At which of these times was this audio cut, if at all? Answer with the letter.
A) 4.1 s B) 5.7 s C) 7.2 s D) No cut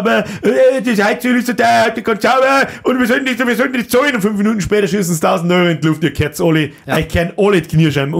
D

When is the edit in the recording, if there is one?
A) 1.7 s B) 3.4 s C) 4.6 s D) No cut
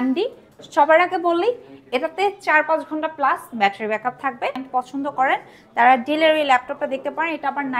C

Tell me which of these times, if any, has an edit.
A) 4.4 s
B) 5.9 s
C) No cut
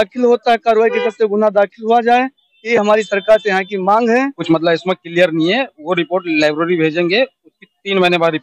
A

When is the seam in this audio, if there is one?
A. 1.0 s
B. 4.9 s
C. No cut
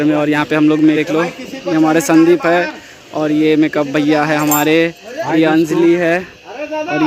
A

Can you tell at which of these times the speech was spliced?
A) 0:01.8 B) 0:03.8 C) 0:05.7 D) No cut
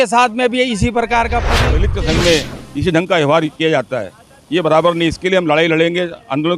A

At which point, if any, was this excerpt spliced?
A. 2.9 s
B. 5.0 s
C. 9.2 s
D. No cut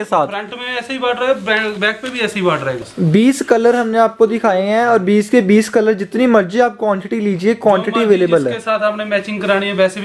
A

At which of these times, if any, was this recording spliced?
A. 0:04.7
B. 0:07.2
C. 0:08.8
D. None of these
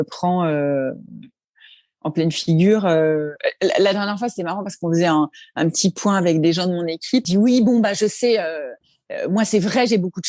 B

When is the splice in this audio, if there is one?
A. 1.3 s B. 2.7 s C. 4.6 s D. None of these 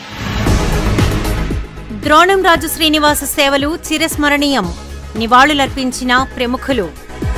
A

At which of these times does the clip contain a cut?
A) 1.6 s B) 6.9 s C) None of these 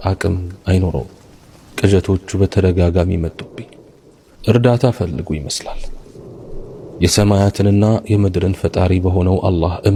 C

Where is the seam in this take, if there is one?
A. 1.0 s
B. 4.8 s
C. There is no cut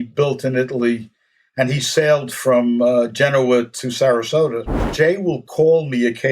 B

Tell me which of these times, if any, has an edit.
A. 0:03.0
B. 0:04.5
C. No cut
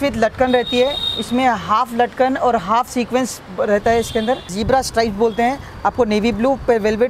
B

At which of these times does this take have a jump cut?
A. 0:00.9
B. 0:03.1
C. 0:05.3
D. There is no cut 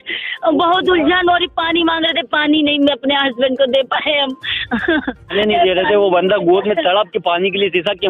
C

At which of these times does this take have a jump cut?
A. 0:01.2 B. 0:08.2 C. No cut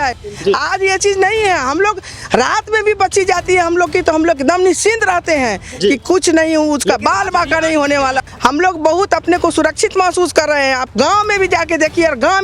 B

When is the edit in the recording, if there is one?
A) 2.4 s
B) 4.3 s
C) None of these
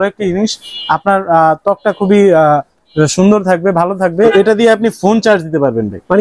B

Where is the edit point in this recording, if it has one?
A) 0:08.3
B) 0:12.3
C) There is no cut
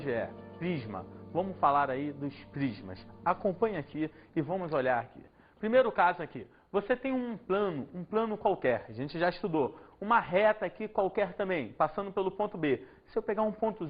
B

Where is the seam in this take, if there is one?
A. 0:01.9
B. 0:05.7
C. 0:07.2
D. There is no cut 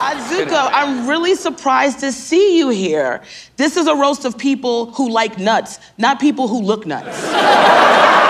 D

